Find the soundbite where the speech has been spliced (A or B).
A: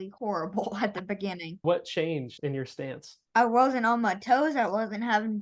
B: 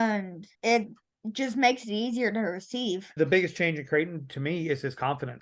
B